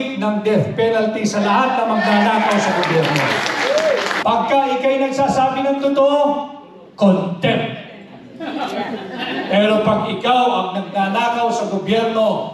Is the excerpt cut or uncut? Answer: cut